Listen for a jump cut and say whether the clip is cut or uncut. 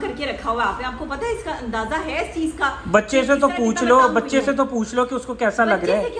uncut